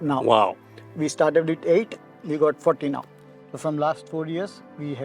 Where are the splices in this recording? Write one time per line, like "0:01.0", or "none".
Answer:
0:03.0